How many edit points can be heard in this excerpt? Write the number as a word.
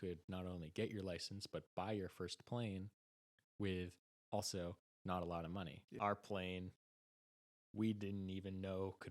one